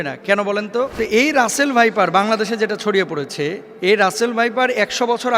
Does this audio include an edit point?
yes; 2 cuts; at 0.9 s, 3.7 s

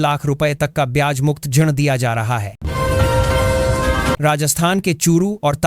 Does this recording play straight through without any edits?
no; 2 cuts; at 2.5 s, 4.2 s

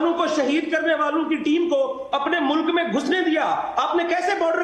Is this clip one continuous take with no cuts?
yes; 0 cuts

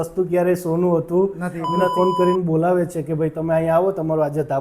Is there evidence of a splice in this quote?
yes; 1 cut; at 1.8 s

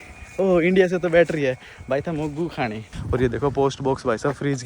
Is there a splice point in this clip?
yes; 1 cut; at 2.9 s

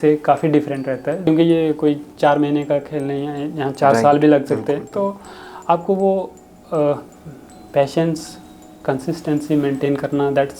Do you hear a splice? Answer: yes; 1 cut; at 1.2 s

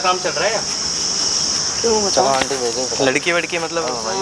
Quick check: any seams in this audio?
no; 0 cuts

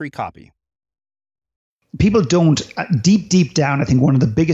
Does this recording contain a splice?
yes; 1 cut; at 2.0 s

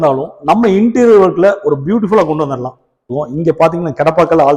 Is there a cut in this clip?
yes; 1 cut; at 3.0 s

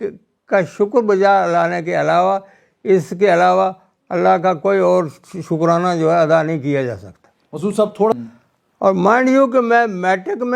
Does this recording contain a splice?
yes; 1 cut; at 8.1 s

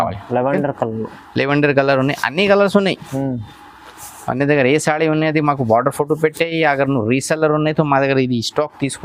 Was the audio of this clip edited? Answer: no; 0 cuts

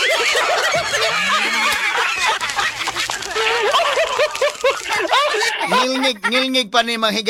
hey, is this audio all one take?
yes; 0 cuts

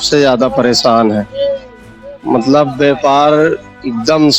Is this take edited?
no; 0 cuts

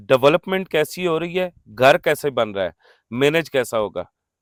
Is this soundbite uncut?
yes; 0 cuts

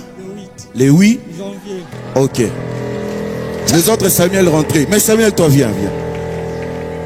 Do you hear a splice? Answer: no; 0 cuts

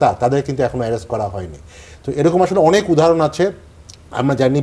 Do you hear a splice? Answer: no; 0 cuts

